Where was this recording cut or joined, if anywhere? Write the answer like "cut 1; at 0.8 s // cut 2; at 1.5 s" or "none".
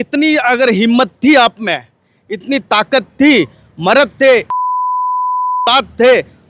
none